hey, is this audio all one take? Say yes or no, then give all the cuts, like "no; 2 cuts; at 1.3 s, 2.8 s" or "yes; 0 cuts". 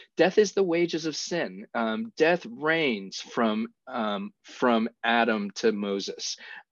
yes; 0 cuts